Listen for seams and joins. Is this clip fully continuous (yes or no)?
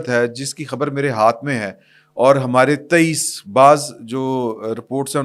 yes